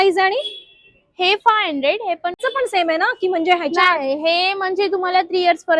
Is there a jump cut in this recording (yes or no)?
yes